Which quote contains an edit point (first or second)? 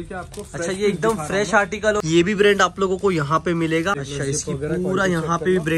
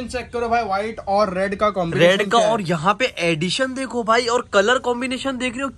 first